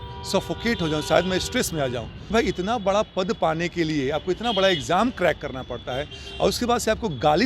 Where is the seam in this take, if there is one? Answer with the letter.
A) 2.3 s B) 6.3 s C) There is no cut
A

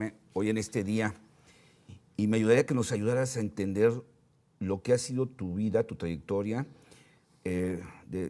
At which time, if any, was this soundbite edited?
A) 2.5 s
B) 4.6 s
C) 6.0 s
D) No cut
D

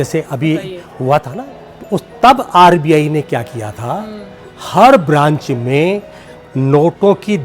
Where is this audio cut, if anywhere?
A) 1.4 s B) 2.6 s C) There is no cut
A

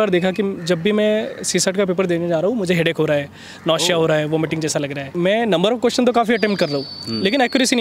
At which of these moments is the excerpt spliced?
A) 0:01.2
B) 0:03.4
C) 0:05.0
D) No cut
C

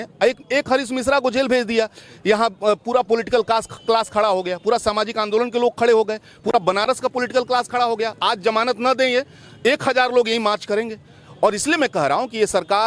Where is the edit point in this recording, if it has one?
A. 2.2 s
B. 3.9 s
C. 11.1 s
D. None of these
D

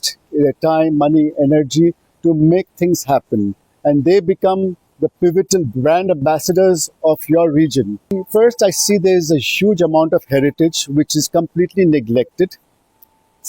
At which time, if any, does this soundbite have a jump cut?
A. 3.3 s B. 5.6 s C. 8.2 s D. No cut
C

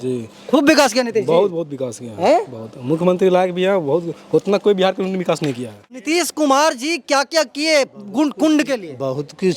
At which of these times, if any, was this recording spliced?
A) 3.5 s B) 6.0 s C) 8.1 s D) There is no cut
B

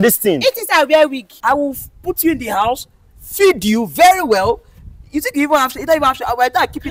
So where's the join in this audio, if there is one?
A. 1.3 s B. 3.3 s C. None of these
A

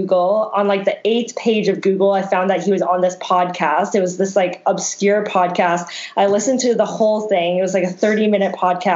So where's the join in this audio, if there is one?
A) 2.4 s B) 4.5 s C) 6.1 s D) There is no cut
D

